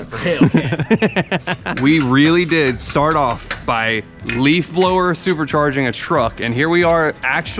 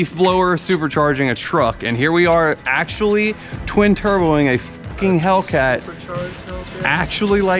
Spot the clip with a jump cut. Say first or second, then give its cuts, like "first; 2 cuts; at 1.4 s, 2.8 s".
first; 1 cut; at 1.6 s